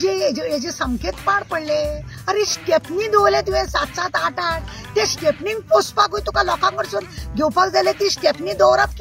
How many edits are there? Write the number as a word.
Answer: one